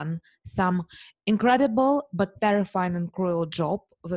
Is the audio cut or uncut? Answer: uncut